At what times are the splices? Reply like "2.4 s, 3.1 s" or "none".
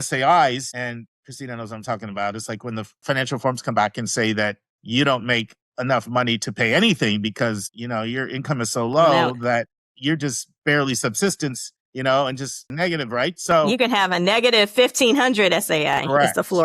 3.0 s, 12.7 s